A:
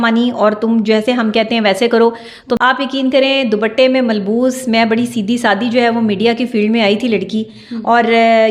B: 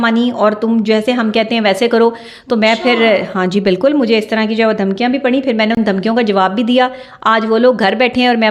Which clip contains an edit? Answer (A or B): A